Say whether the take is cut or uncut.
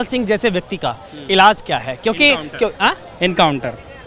uncut